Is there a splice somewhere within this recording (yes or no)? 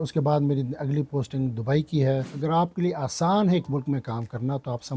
yes